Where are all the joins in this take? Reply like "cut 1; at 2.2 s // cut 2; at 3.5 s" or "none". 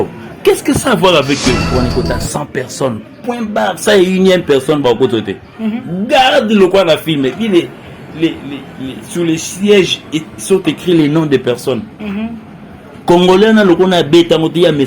cut 1; at 1.7 s